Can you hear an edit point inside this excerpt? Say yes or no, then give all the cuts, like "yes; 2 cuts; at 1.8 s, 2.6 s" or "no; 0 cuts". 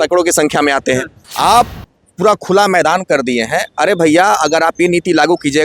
yes; 1 cut; at 1.2 s